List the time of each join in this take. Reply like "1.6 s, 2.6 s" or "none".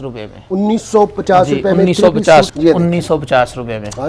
2.5 s

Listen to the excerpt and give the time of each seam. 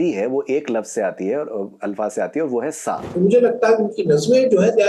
3.0 s

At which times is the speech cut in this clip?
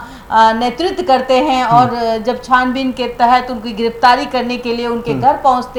none

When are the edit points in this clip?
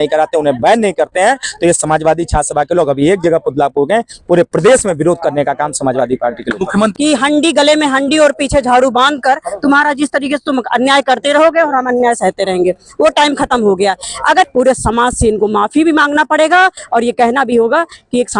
6.9 s, 14.5 s

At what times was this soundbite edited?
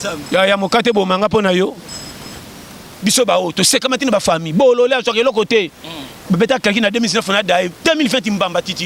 2.2 s

